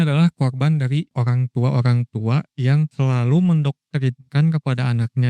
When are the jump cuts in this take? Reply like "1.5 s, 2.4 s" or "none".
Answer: 1.1 s, 2.9 s